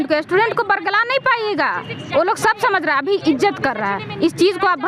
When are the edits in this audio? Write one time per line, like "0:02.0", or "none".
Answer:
none